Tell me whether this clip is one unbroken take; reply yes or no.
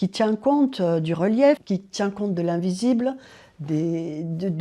no